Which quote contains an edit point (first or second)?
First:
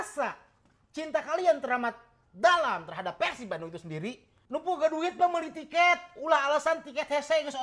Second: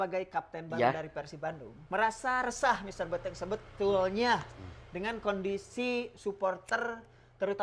first